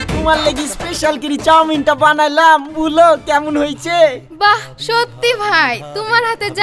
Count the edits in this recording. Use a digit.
0